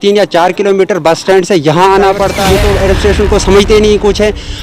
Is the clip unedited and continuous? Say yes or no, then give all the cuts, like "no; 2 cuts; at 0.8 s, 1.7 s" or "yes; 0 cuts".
no; 1 cut; at 2.4 s